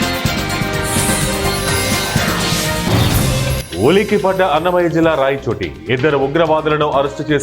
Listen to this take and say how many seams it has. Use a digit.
1